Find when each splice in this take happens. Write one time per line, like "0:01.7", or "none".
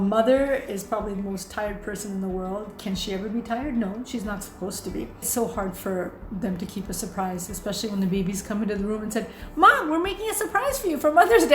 0:05.3